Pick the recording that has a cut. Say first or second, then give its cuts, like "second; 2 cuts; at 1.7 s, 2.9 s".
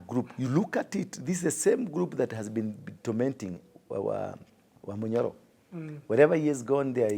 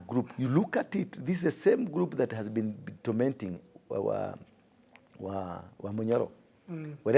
first; 1 cut; at 4.7 s